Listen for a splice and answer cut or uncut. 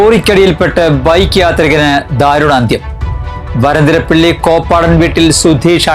uncut